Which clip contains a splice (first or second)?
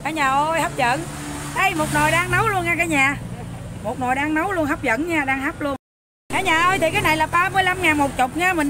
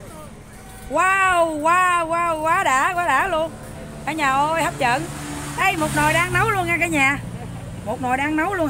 first